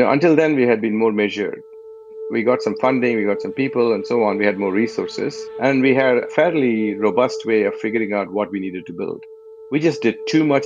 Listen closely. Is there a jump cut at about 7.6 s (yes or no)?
no